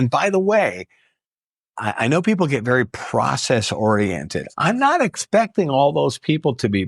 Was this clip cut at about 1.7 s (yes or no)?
no